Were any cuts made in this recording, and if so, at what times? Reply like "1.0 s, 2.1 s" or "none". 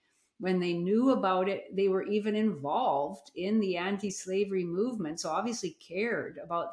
none